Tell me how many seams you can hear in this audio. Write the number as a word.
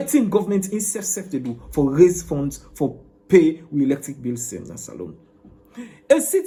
zero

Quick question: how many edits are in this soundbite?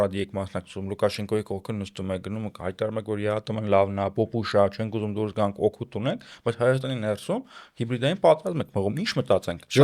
zero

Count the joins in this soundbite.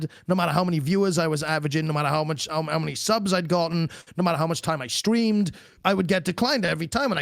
one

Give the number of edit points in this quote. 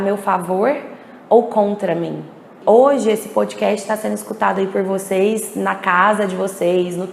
one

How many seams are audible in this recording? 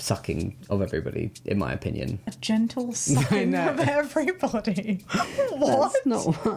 zero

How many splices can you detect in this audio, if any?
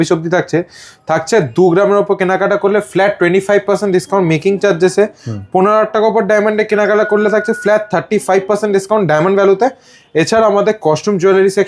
zero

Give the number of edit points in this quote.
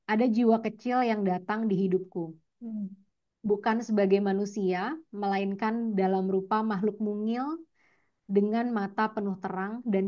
zero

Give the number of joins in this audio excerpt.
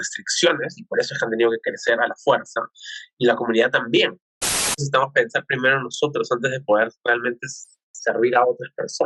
one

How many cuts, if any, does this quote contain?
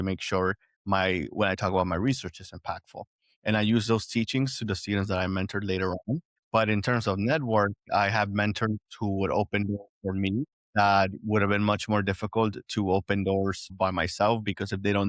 one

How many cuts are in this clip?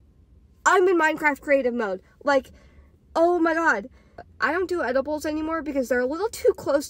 one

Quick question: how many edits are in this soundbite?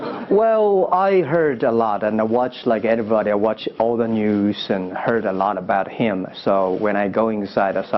one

